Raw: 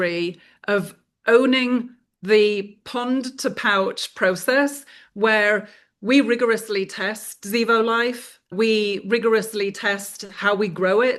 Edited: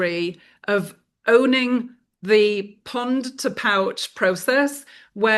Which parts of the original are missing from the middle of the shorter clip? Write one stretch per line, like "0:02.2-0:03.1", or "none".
none